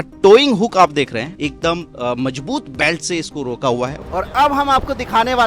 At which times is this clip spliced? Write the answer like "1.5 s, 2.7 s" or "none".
1.3 s, 4.0 s